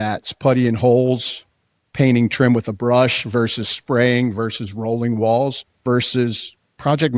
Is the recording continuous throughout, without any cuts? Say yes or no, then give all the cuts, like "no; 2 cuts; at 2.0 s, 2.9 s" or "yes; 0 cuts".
no; 1 cut; at 5.8 s